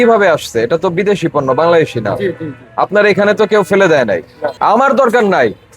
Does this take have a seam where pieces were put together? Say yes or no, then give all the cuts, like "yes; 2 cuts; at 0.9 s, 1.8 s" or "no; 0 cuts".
yes; 1 cut; at 4.4 s